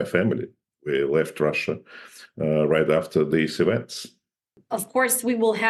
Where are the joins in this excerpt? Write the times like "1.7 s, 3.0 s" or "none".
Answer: 4.6 s